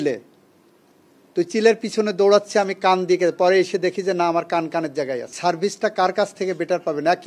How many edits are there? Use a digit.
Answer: 1